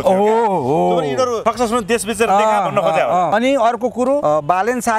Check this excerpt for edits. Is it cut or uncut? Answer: cut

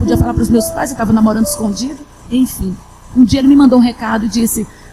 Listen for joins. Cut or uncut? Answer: cut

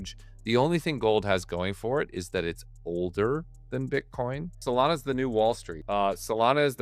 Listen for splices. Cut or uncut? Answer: cut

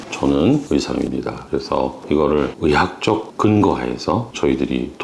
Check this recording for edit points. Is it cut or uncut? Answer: uncut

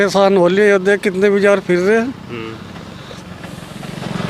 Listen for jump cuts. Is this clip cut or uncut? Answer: uncut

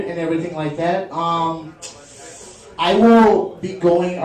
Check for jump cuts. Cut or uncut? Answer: cut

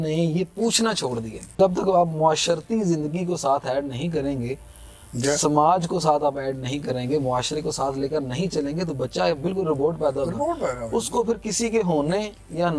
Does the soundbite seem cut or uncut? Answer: cut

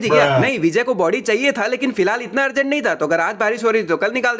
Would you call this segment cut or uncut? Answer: uncut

